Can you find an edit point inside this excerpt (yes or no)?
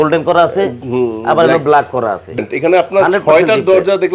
yes